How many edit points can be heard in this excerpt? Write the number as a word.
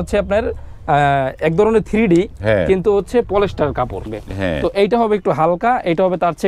one